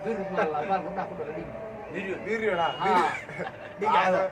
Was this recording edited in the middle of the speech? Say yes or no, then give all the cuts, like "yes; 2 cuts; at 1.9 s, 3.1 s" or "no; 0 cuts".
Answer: no; 0 cuts